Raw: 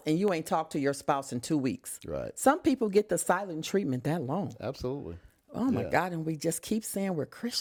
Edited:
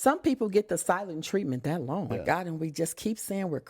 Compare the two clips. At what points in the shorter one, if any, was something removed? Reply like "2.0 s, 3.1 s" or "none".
2.1 s